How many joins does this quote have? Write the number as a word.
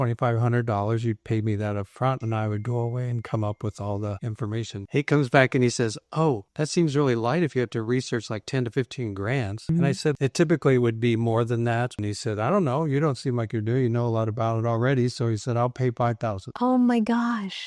zero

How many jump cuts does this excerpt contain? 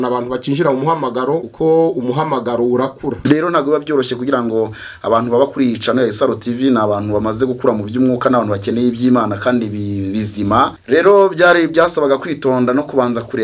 three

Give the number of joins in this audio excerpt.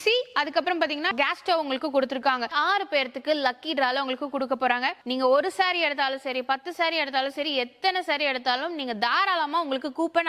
three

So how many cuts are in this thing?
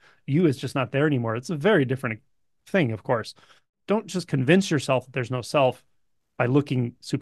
one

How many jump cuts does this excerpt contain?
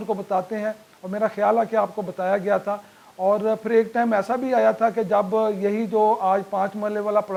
zero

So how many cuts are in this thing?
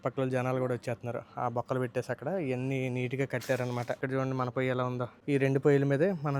two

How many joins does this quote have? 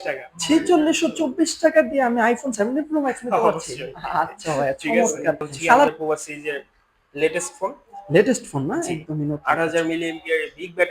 one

